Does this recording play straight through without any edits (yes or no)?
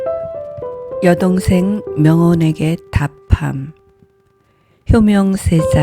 no